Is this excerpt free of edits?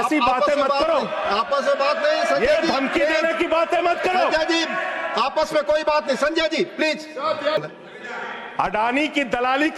no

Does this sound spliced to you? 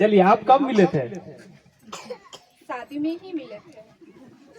no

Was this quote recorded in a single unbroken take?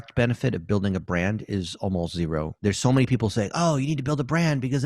no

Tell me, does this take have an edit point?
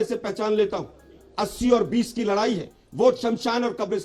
no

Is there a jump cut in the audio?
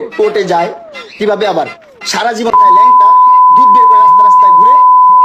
no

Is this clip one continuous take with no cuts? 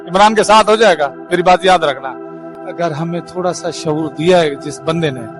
no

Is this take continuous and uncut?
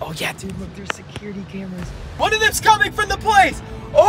no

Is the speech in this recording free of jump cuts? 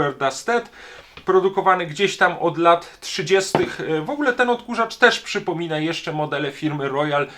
yes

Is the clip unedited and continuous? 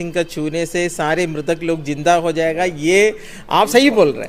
yes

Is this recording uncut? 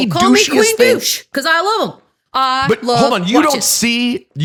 yes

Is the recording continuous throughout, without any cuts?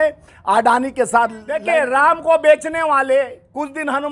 no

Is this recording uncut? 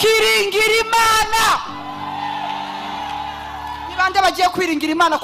yes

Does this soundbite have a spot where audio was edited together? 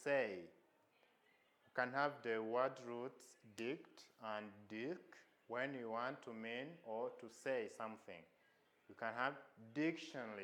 no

